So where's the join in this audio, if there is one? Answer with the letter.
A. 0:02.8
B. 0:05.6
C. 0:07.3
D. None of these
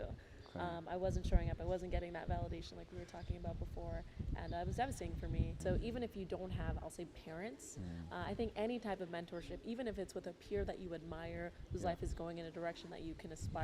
B